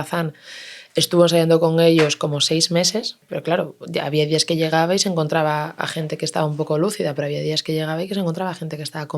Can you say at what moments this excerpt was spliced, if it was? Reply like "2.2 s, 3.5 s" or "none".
3.3 s